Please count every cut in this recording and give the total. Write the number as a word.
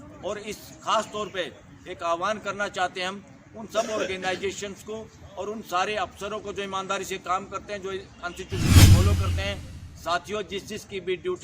two